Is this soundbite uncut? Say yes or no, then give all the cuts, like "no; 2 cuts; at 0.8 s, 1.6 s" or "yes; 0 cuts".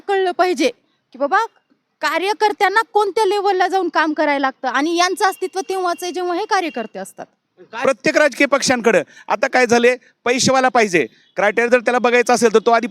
no; 1 cut; at 7.8 s